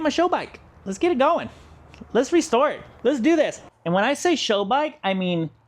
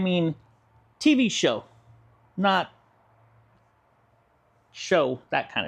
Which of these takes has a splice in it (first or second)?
first